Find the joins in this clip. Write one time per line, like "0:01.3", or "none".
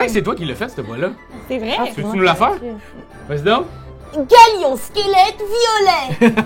0:02.9